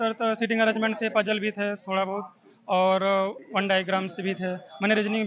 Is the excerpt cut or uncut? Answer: uncut